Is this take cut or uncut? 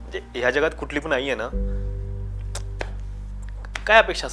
uncut